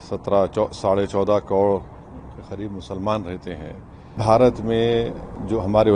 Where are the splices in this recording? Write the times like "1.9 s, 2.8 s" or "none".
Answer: 4.2 s